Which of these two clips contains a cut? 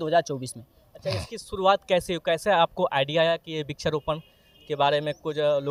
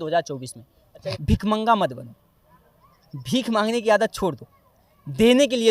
second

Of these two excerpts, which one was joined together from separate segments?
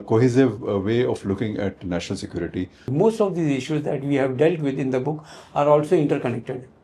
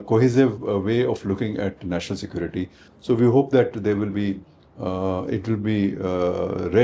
first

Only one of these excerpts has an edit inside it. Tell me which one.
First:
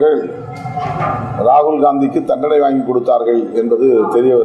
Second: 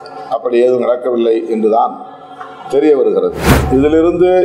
second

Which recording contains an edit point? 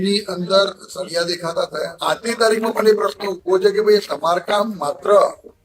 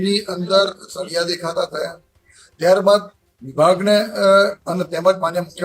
first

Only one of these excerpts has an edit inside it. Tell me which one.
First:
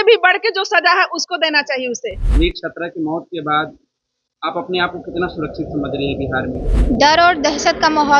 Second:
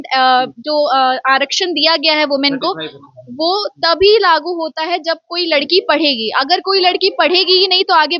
first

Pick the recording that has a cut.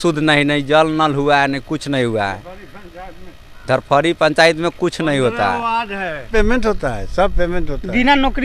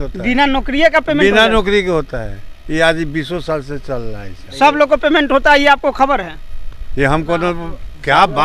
first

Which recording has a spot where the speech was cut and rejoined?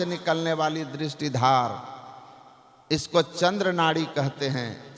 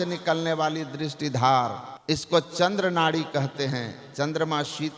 second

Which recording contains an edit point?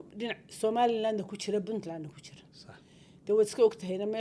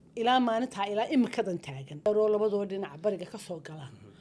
second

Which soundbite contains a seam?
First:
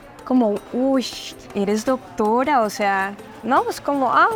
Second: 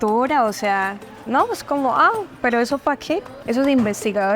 second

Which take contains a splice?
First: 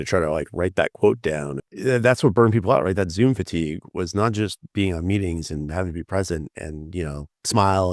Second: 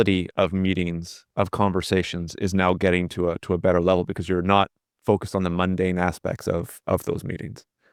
first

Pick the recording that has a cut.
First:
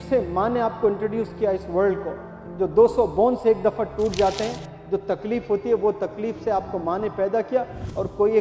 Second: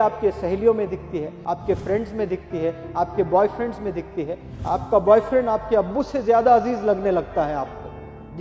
second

